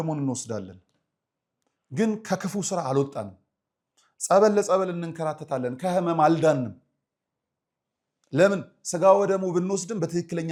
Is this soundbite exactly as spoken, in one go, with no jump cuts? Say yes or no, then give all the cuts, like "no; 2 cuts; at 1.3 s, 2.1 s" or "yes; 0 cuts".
yes; 0 cuts